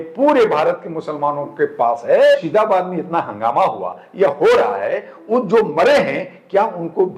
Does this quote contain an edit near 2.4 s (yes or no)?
yes